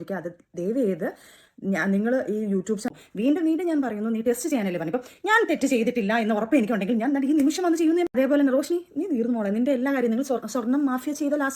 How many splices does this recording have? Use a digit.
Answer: 2